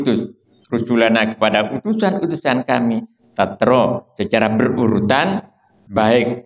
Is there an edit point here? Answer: no; 0 cuts

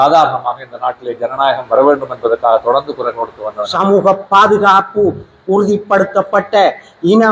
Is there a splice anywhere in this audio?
yes; 1 cut; at 3.6 s

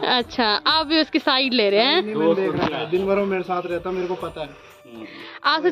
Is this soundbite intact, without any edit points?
yes; 0 cuts

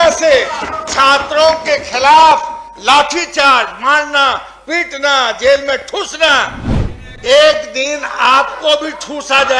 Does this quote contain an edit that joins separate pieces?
no; 0 cuts

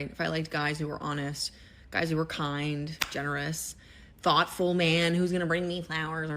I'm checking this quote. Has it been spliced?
yes; 1 cut; at 1.6 s

